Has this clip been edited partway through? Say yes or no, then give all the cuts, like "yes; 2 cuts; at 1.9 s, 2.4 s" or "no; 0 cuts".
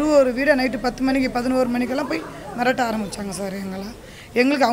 no; 0 cuts